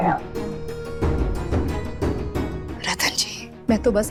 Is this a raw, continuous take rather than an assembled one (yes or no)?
yes